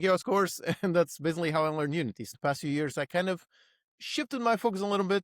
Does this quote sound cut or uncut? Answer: cut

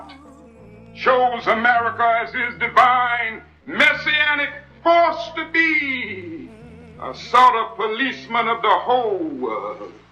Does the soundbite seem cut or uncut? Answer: uncut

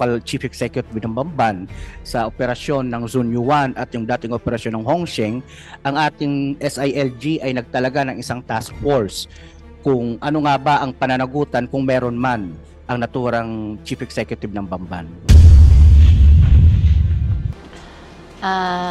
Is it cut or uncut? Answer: cut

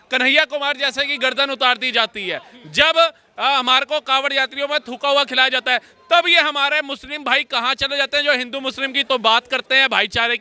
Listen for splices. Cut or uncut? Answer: uncut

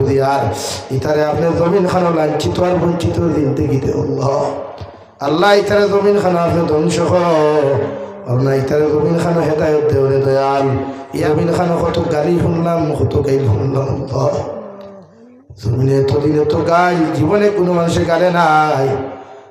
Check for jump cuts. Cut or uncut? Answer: cut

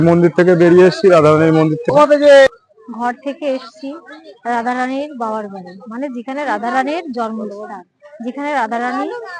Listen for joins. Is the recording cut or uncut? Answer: cut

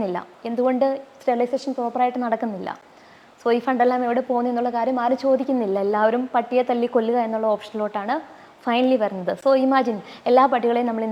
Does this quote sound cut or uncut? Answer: uncut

